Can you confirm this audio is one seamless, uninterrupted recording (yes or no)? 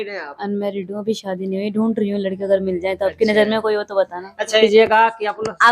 no